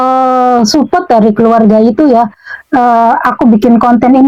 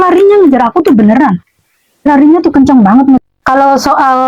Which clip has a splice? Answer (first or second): second